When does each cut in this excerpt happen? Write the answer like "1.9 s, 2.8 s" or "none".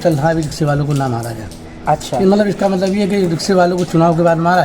none